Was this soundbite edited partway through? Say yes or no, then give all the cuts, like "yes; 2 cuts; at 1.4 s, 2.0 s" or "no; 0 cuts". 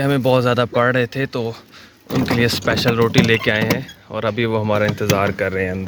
no; 0 cuts